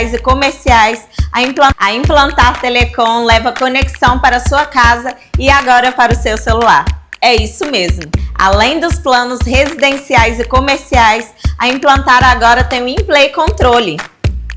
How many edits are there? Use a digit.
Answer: 1